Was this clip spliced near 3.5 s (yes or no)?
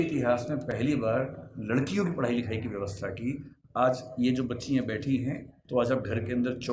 no